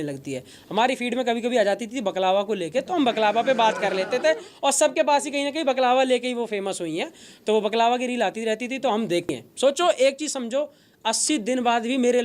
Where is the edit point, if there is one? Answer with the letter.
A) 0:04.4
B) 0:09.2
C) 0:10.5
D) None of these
B